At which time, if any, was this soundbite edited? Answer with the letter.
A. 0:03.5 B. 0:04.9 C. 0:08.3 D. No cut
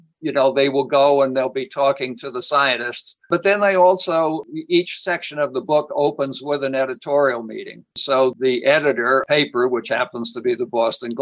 C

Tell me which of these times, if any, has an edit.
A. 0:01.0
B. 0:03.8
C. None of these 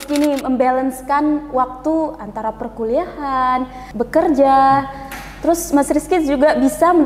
B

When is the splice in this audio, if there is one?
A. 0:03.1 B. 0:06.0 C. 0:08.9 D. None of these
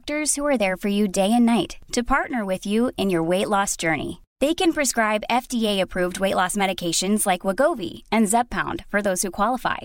D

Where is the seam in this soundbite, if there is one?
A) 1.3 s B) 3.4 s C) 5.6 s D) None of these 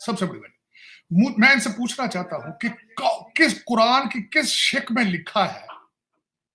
D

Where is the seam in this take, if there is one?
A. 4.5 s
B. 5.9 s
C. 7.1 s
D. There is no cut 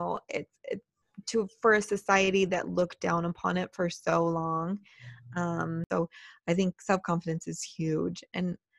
B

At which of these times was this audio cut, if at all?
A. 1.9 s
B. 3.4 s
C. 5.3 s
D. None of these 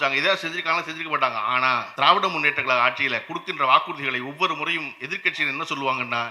A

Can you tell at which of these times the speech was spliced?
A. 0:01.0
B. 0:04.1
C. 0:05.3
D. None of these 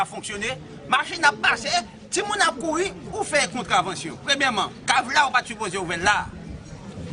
D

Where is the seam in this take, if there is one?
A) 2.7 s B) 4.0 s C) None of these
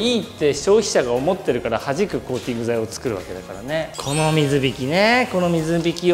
B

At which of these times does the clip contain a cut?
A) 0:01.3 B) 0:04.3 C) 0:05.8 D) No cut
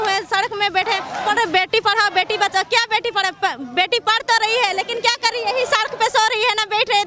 A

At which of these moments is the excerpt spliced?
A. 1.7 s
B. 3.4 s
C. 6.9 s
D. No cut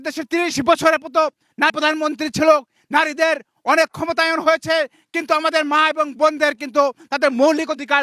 A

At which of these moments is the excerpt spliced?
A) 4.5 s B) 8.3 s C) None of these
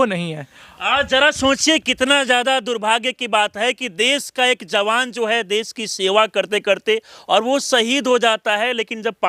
C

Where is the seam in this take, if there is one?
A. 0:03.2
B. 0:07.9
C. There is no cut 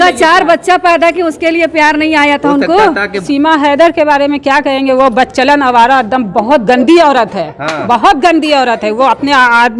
A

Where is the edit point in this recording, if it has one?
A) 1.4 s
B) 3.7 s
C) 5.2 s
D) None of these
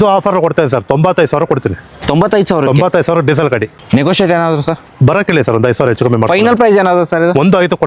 B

